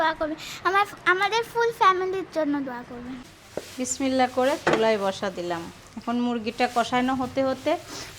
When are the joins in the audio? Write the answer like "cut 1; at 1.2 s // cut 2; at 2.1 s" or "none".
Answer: cut 1; at 3.6 s